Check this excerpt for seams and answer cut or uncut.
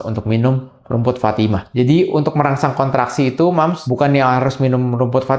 uncut